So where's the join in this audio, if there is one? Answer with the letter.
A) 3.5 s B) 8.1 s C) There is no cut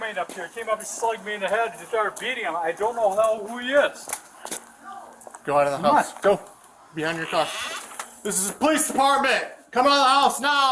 B